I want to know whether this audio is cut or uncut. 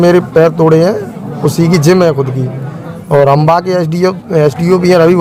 uncut